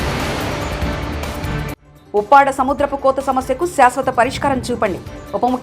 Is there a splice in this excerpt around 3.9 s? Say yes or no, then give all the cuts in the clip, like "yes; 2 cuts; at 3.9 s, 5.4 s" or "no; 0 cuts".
no; 1 cut; at 1.9 s